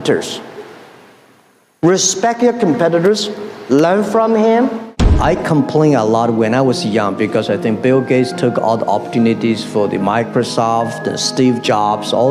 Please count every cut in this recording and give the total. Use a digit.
1